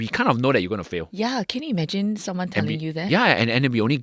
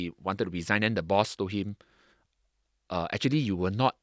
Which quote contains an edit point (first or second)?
first